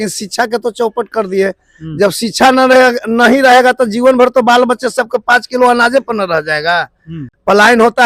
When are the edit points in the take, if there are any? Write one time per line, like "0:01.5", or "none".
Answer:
none